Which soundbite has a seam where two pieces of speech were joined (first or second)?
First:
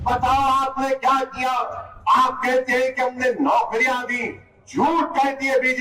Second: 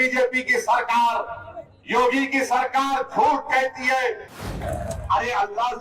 second